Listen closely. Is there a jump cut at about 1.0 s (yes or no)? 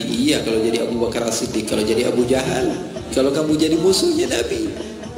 no